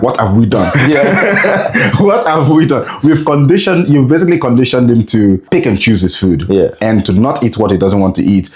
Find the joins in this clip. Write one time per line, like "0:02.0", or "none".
0:05.4